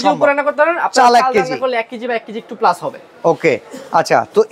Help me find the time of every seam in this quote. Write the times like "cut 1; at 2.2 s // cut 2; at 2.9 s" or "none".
none

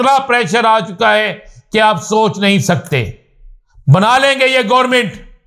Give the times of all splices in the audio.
none

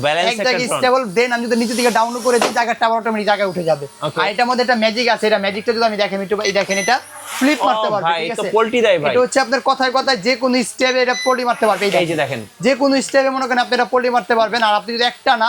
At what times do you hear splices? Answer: none

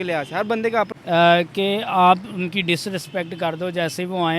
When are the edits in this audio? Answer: cut 1; at 0.9 s

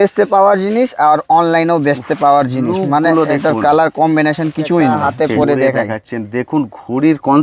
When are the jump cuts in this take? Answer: cut 1; at 5.0 s

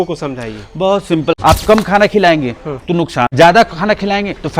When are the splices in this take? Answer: cut 1; at 1.6 s // cut 2; at 3.3 s

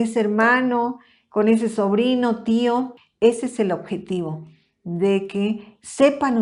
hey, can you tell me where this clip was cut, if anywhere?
cut 1; at 3.0 s

